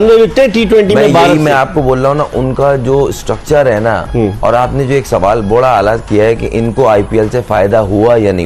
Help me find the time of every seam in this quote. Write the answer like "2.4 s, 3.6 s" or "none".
none